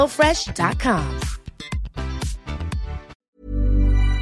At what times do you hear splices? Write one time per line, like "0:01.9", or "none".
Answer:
0:03.2

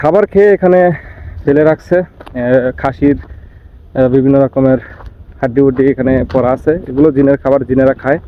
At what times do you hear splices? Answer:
none

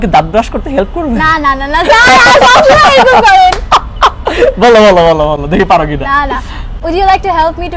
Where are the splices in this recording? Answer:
none

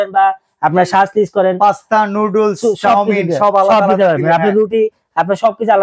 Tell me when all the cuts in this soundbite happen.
none

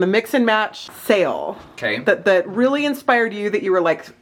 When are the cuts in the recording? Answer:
none

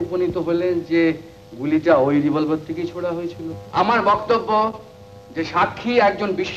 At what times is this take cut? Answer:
0:03.5

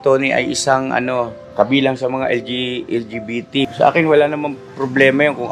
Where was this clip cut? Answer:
0:01.4
0:03.6

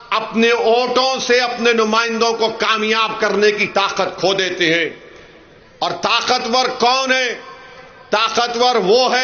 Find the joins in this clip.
none

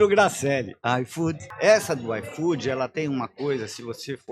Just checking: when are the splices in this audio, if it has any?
0:01.5

